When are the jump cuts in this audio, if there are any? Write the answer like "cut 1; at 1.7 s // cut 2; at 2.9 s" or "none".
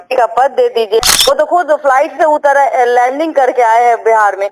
cut 1; at 1.0 s